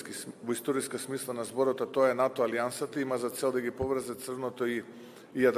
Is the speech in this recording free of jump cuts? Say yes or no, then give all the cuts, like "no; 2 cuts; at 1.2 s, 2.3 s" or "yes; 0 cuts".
yes; 0 cuts